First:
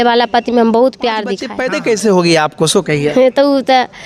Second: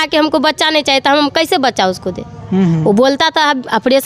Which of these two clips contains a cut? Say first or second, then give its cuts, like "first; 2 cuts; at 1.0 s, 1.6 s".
first; 1 cut; at 1.5 s